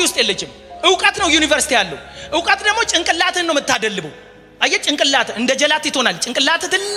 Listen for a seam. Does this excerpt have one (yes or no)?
no